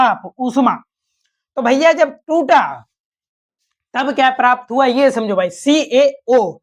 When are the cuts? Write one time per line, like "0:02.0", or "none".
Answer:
none